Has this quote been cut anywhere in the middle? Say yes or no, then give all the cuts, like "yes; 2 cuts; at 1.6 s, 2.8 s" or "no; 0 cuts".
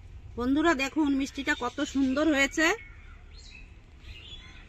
no; 0 cuts